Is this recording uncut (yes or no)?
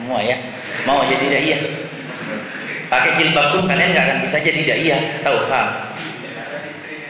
yes